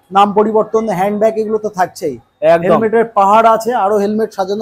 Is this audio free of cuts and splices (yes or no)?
yes